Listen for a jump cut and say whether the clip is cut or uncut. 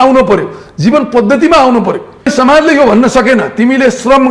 cut